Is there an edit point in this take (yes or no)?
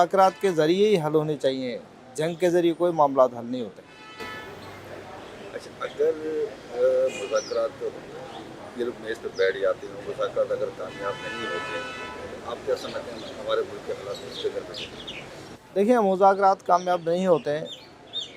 no